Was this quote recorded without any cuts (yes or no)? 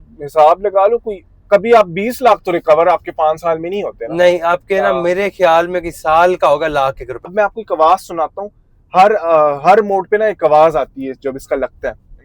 no